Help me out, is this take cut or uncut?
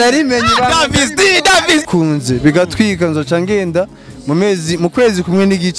cut